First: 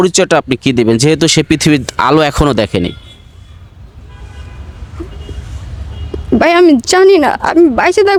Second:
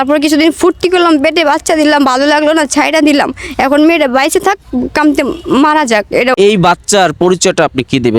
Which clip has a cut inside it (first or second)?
second